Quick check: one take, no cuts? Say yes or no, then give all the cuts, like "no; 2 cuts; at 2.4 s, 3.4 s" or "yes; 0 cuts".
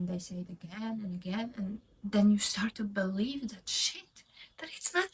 yes; 0 cuts